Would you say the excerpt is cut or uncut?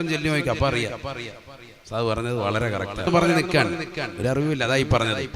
cut